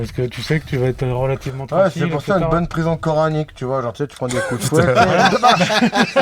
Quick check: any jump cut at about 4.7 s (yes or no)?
yes